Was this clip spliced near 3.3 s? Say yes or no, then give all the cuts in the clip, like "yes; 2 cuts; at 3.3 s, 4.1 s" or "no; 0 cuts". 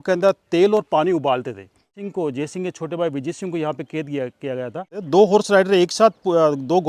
no; 2 cuts; at 2.0 s, 5.0 s